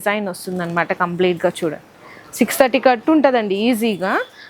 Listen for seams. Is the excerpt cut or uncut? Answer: uncut